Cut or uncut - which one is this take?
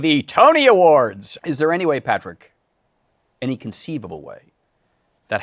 cut